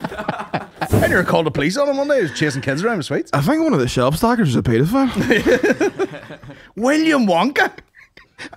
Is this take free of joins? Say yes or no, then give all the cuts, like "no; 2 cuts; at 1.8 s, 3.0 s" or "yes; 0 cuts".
no; 1 cut; at 0.9 s